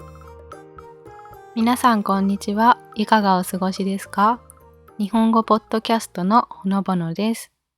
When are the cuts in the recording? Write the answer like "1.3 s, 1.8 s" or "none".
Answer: 1.5 s